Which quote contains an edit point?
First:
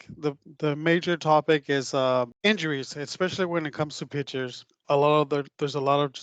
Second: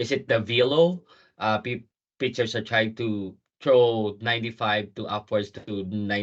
first; 2 cuts; at 2.3 s, 4.7 s

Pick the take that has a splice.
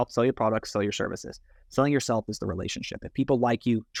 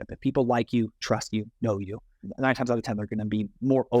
second; 1 cut; at 2.2 s

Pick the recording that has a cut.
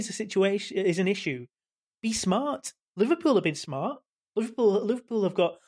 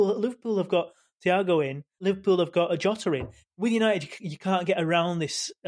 second; 2 cuts; at 2.0 s, 3.4 s

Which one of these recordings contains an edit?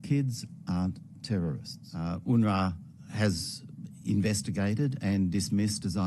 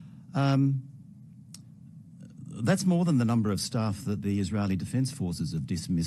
first; 1 cut; at 2.2 s

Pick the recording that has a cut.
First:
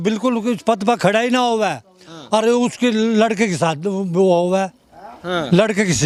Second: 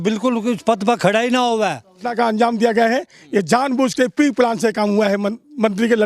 second; 1 cut; at 2.1 s

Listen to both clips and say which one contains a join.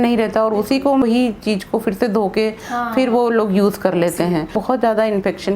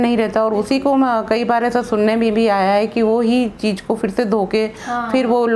first; 2 cuts; at 1.0 s, 4.6 s

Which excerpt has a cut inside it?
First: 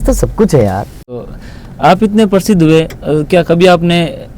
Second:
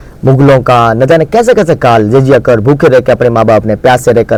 first; 1 cut; at 1.2 s

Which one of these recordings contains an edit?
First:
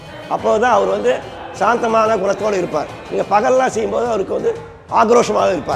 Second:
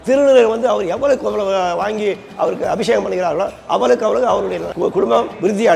second; 1 cut; at 4.7 s

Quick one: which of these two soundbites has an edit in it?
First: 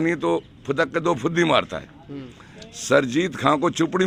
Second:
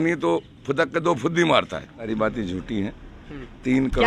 second; 1 cut; at 2.1 s

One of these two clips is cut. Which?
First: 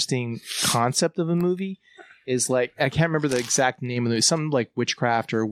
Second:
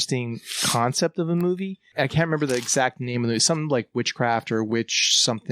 second; 1 cut; at 1.9 s

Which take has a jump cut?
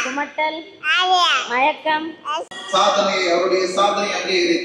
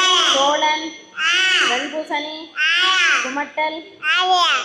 first; 1 cut; at 2.5 s

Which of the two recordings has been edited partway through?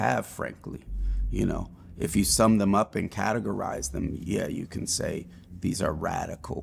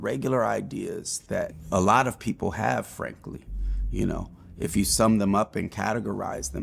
second; 1 cut; at 1.6 s

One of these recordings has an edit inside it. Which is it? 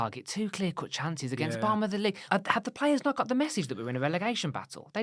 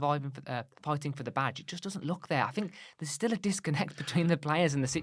first; 1 cut; at 2.2 s

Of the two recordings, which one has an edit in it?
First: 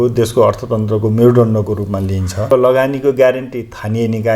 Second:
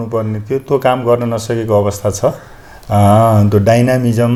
first; 1 cut; at 2.4 s

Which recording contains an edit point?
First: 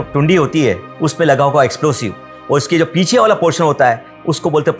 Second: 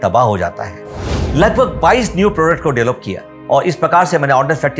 second; 1 cut; at 1.1 s

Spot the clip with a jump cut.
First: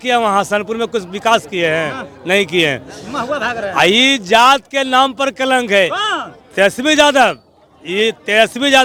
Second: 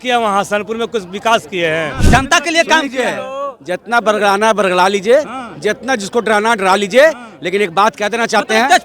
second; 1 cut; at 2.0 s

